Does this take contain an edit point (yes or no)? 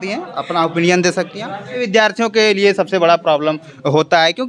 yes